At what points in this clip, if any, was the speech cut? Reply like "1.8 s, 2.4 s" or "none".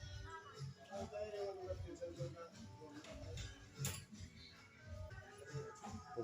5.1 s